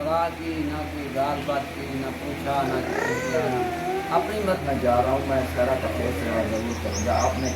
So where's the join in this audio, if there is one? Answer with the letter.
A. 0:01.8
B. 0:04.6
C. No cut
B